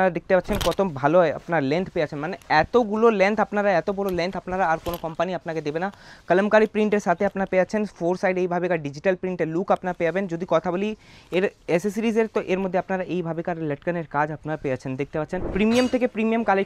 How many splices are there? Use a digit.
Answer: 1